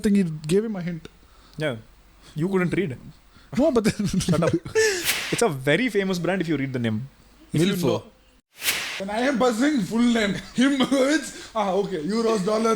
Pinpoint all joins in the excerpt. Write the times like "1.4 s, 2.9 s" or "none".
5.1 s, 8.7 s